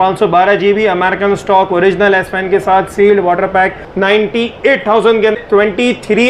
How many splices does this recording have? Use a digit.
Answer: 2